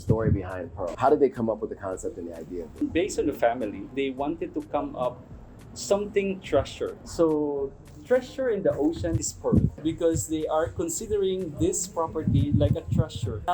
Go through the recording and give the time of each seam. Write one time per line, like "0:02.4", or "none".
0:00.9
0:03.9
0:07.0
0:09.8